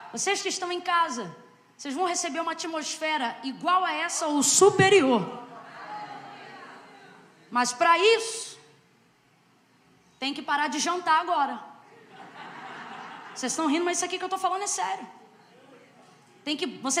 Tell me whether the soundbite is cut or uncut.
uncut